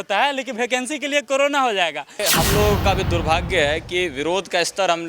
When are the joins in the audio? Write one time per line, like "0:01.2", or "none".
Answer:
0:02.2